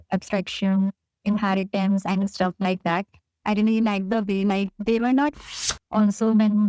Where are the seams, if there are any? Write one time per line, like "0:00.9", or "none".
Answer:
0:05.4